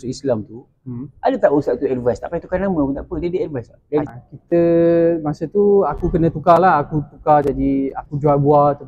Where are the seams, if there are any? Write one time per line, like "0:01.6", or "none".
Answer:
0:04.1